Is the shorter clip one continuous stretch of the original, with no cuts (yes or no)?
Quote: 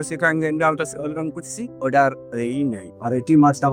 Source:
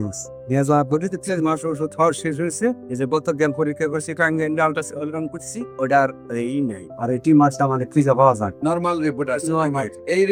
yes